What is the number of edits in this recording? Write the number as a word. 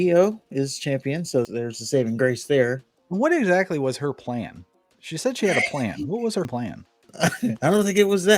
one